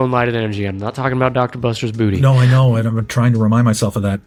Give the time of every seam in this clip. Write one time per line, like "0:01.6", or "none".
none